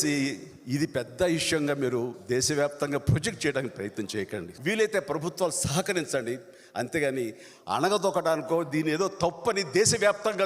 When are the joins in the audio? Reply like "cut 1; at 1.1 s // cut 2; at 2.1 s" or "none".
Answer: cut 1; at 4.5 s

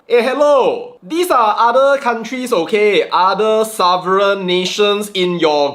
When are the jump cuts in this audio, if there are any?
none

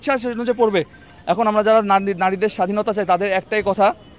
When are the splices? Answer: none

